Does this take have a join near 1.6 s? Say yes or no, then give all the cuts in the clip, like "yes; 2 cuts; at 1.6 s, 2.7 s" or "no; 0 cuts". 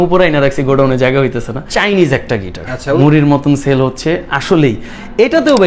yes; 2 cuts; at 1.6 s, 3.0 s